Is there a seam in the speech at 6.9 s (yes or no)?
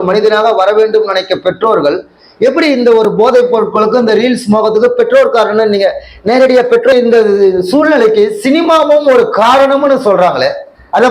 yes